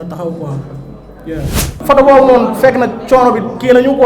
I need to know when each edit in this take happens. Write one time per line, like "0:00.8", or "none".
0:01.7